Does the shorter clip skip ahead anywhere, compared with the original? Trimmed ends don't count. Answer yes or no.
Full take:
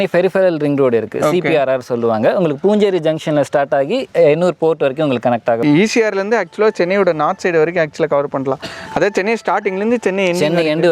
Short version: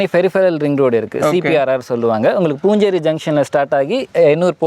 no